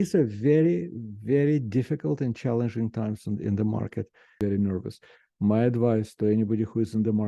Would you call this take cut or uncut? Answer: cut